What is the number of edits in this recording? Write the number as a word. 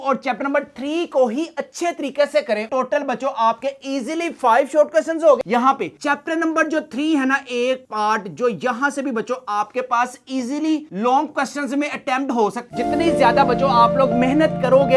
three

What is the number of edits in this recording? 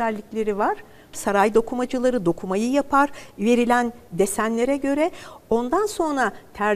one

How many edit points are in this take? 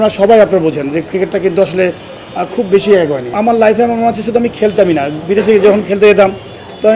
one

